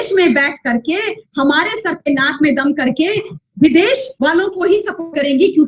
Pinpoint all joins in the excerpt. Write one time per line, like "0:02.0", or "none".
0:04.1